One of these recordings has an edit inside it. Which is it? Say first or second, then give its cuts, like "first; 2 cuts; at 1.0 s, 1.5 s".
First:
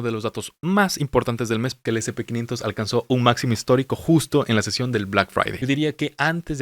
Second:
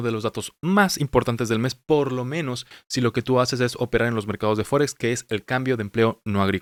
first; 2 cuts; at 1.8 s, 5.5 s